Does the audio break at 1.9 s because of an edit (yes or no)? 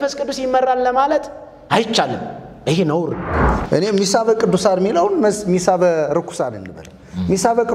no